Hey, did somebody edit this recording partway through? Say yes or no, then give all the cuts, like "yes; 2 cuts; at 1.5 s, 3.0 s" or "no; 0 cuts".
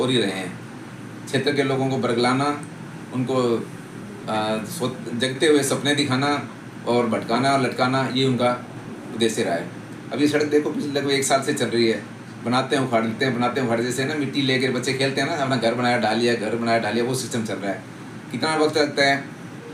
no; 0 cuts